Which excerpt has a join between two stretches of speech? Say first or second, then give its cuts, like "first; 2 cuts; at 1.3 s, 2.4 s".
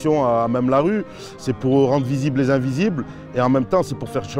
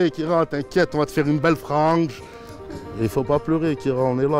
second; 1 cut; at 2.7 s